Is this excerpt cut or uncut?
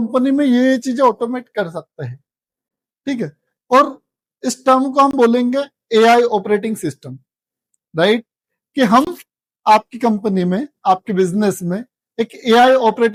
uncut